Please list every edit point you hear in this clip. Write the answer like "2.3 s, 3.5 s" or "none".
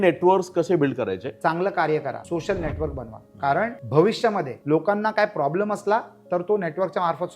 1.3 s, 2.2 s, 3.8 s, 4.5 s